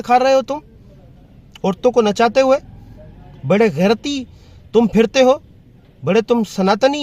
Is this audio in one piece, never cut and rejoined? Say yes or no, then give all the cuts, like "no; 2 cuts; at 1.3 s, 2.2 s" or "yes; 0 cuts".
yes; 0 cuts